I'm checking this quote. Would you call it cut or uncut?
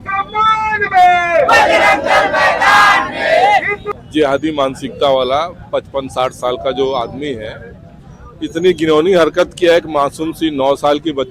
cut